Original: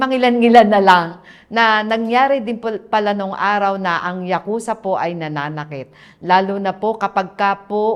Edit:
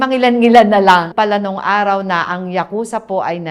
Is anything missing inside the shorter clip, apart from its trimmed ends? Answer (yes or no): yes